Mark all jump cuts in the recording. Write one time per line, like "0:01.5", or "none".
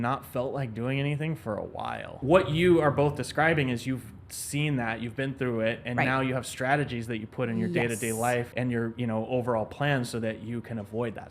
0:02.1
0:08.5